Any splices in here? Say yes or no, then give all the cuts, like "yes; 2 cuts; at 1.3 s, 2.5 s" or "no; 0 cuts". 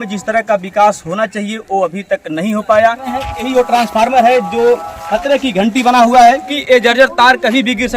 yes; 2 cuts; at 3.0 s, 6.5 s